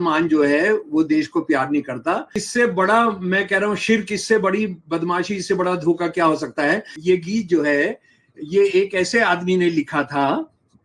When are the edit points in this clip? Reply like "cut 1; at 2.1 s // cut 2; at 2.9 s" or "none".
cut 1; at 2.4 s // cut 2; at 6.9 s